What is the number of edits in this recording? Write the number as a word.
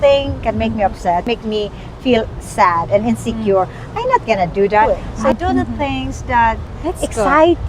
three